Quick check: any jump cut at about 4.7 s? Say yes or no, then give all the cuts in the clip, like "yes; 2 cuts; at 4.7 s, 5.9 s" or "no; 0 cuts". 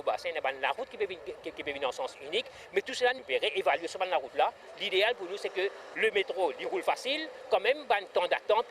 yes; 3 cuts; at 3.2 s, 4.7 s, 5.8 s